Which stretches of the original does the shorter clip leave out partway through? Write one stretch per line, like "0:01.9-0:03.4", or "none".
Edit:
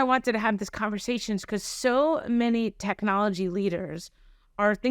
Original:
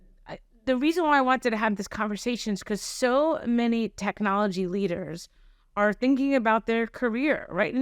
none